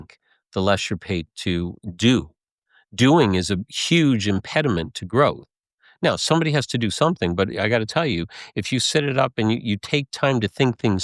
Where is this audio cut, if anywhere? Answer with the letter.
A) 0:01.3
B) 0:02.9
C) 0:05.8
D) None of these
A